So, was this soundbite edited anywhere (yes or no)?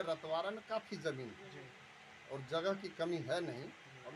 no